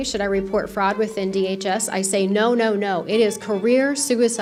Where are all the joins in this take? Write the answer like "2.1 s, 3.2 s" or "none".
none